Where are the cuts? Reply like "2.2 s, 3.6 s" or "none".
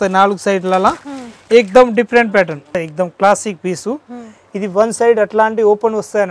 2.8 s